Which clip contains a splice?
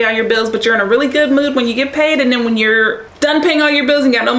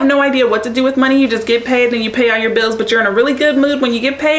first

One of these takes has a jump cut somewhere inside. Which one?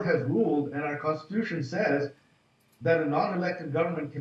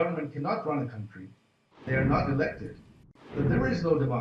second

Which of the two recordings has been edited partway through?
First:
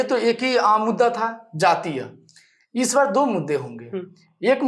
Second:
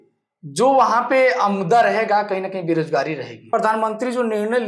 second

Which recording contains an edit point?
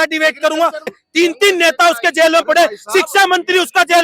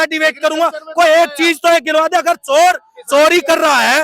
first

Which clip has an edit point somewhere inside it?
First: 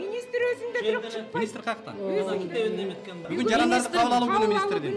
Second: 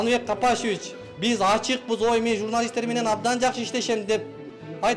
first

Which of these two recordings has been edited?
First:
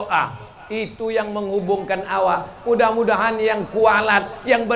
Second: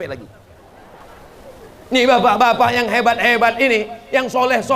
second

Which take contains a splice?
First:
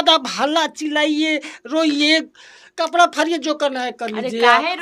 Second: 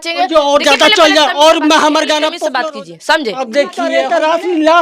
second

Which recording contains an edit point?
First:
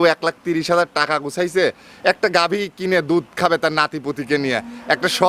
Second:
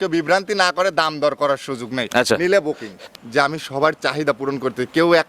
second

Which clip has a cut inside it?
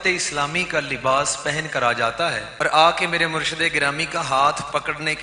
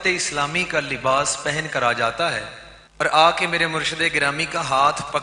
first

